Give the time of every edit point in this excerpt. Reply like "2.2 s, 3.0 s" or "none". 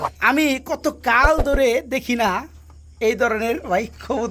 none